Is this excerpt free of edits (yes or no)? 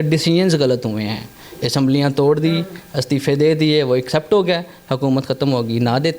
yes